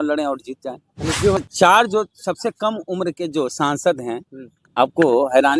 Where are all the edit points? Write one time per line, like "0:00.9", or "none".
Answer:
0:01.4